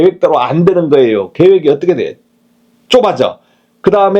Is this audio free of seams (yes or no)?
yes